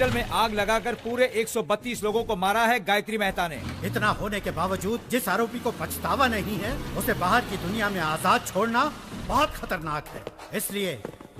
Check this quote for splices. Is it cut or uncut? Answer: cut